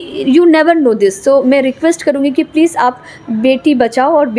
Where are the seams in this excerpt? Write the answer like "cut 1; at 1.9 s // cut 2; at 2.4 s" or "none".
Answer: none